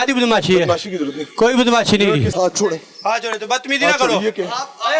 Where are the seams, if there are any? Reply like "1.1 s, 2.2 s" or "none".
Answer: 2.3 s

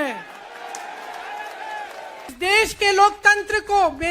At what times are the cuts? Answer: 2.3 s

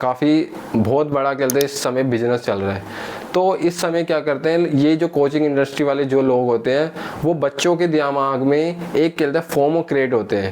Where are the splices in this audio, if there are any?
none

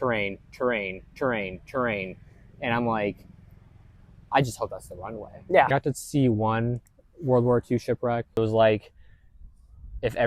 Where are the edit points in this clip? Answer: 5.7 s, 8.4 s

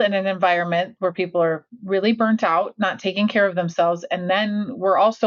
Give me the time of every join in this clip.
none

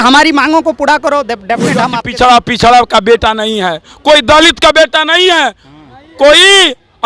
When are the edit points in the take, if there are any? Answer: 1.8 s

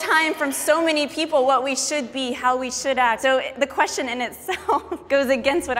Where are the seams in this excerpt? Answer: 3.2 s, 5.0 s

